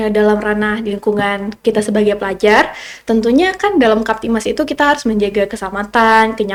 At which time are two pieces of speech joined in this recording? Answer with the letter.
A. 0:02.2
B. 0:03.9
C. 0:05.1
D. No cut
D